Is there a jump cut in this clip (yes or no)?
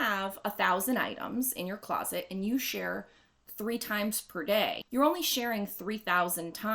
yes